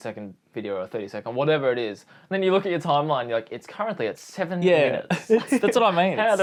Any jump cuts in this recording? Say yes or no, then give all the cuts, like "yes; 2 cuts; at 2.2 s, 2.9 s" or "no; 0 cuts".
no; 0 cuts